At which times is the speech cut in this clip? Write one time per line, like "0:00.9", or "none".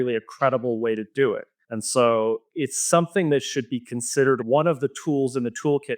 0:04.4